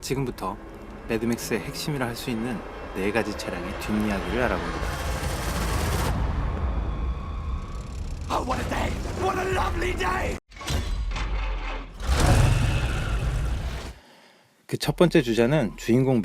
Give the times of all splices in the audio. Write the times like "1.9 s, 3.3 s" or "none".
14.0 s

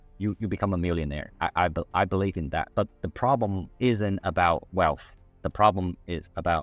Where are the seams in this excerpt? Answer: 2.7 s, 3.7 s

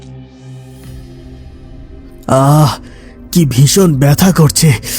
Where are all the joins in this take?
2.3 s

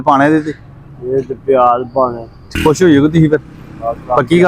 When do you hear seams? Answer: 2.4 s

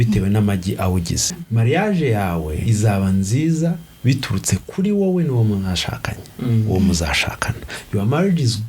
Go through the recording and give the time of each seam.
1.4 s, 2.6 s

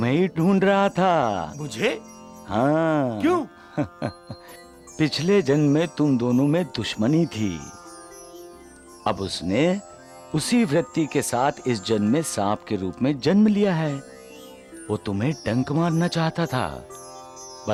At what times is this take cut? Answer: none

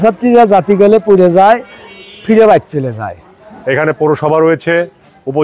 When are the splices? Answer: 3.4 s

